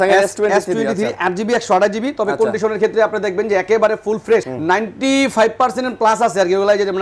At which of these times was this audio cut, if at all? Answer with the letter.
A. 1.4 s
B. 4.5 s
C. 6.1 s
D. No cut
B